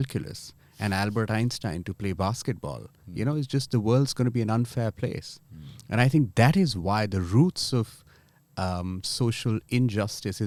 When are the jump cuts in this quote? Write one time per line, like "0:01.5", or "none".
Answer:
none